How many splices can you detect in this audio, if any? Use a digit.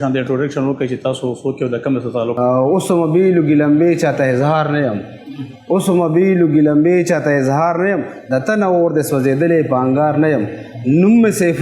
1